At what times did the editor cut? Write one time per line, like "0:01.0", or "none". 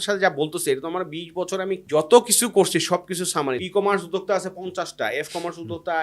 0:01.8
0:03.6